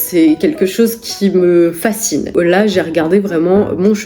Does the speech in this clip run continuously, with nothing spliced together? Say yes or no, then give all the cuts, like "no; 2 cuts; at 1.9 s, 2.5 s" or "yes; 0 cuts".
no; 1 cut; at 2.3 s